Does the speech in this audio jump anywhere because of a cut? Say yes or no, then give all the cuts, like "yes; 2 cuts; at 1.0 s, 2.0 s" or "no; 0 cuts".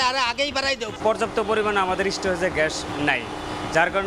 yes; 1 cut; at 0.9 s